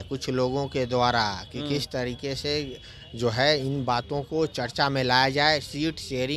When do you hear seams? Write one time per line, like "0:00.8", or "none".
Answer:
none